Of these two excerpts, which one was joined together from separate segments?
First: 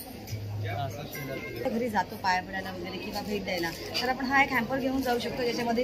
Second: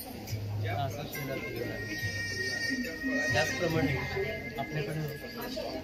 first; 1 cut; at 1.7 s

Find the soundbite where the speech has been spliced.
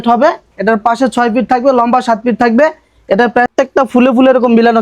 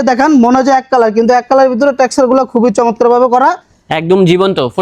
first; 1 cut; at 3.5 s

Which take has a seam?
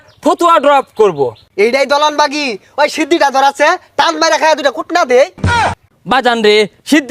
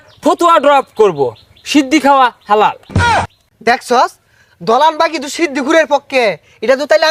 first; 2 cuts; at 1.4 s, 5.6 s

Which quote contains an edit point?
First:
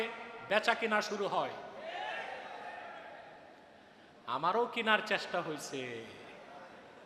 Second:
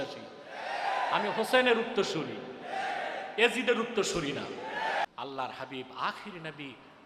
second; 1 cut; at 5.0 s

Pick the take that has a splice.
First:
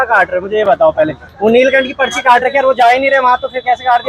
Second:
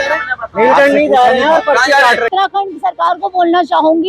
second; 1 cut; at 2.3 s

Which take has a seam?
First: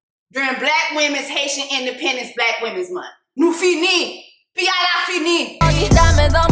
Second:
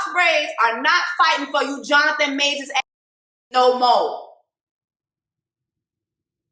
first; 1 cut; at 5.5 s

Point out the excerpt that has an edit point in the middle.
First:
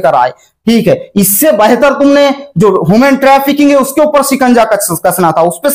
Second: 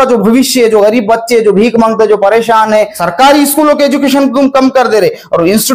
second; 1 cut; at 3.0 s

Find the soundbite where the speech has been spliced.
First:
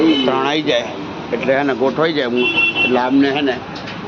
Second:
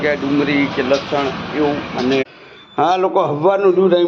second; 1 cut; at 2.2 s

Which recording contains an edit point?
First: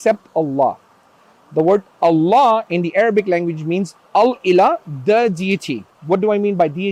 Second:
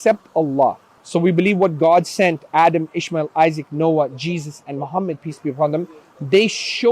second; 1 cut; at 0.9 s

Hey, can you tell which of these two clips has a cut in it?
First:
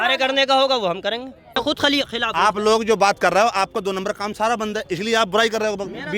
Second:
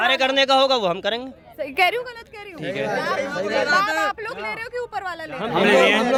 first; 1 cut; at 1.6 s

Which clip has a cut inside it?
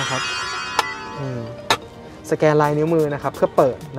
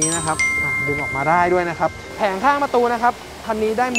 second; 1 cut; at 2.0 s

